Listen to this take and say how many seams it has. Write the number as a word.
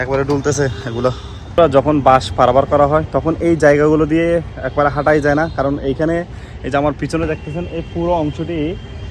one